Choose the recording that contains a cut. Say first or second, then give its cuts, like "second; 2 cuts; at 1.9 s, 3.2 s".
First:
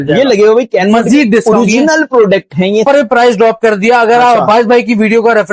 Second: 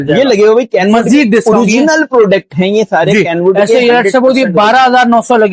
first; 1 cut; at 2.8 s